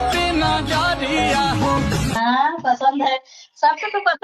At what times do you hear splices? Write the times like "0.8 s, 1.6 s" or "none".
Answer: 2.2 s